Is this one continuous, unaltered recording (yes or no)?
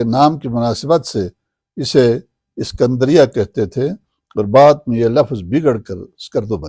yes